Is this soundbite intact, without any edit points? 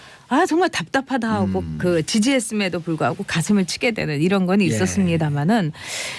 no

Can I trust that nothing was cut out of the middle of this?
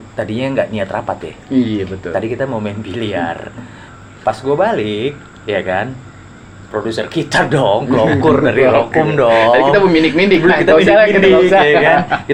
yes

